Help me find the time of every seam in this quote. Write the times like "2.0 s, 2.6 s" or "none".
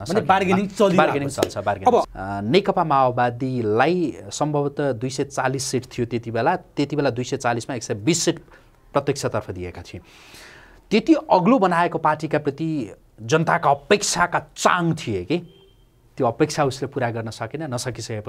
2.0 s